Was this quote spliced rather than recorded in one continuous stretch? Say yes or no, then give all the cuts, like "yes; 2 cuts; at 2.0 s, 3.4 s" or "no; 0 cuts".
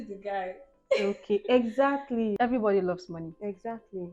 yes; 1 cut; at 2.4 s